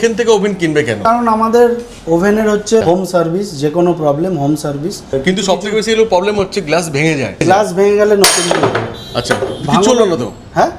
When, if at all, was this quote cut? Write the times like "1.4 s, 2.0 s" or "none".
1.0 s, 2.8 s, 5.1 s, 7.4 s